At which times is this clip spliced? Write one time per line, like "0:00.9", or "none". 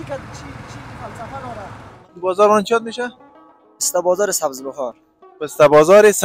0:02.1

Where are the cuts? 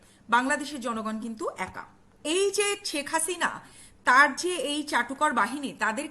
0:02.1

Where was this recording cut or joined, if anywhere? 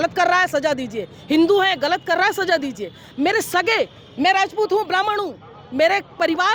none

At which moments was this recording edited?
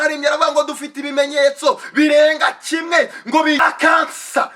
0:03.6

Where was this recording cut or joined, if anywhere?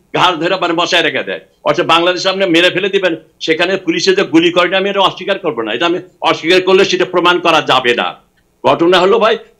none

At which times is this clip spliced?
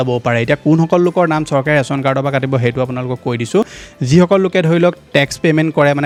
none

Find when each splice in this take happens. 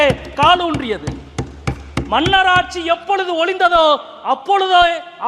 none

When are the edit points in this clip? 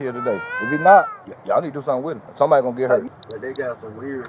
0:02.2
0:03.1

